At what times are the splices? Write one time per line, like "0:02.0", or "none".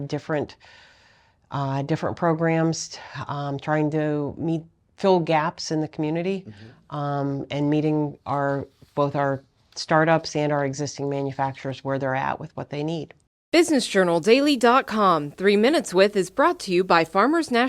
0:13.2